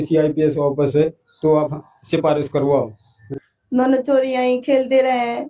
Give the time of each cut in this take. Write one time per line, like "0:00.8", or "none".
0:03.2